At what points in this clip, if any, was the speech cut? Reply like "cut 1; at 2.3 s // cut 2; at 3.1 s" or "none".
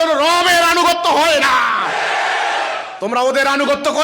cut 1; at 2.9 s